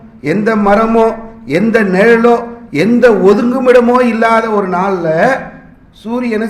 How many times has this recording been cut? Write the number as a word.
zero